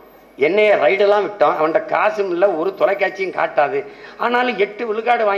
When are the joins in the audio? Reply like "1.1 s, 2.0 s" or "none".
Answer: none